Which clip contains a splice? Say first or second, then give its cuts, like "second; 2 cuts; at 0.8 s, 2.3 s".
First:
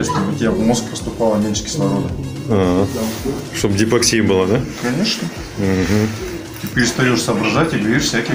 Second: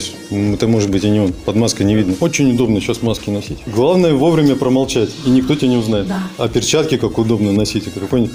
second; 4 cuts; at 1.4 s, 2.2 s, 3.6 s, 6.3 s